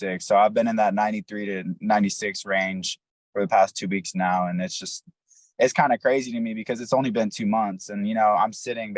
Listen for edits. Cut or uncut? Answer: uncut